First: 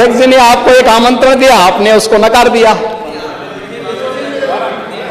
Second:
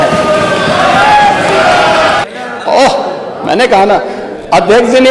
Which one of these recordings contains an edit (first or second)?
second